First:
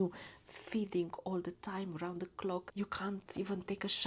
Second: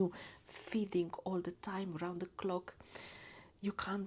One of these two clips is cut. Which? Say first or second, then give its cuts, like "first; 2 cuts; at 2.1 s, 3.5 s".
first; 1 cut; at 2.7 s